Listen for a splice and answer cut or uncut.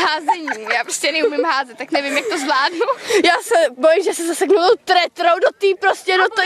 cut